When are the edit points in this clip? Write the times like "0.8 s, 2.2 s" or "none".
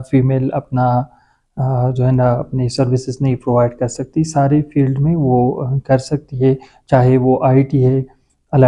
none